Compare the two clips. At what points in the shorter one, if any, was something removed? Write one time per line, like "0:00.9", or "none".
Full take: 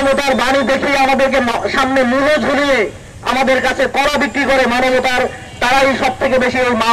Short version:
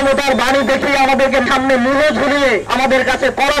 0:01.5
0:02.7